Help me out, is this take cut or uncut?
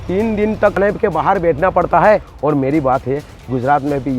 cut